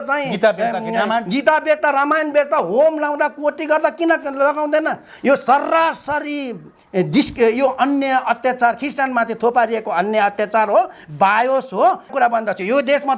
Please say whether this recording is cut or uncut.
cut